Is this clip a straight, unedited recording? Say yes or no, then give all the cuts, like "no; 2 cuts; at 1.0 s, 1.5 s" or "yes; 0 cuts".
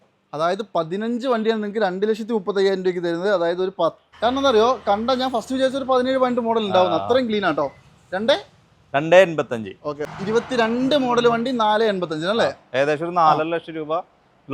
no; 2 cuts; at 4.0 s, 10.0 s